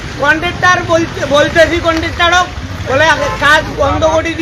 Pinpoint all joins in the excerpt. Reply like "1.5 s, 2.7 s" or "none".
none